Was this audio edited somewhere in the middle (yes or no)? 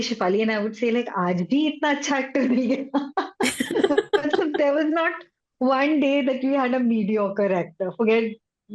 no